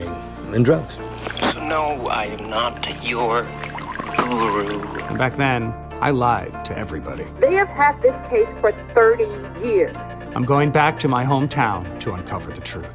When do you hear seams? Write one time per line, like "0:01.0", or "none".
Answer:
none